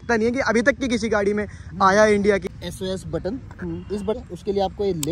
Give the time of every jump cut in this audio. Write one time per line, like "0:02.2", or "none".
0:02.4
0:04.2